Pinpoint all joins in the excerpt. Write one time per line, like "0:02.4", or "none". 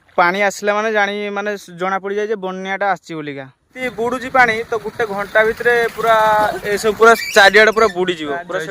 0:03.7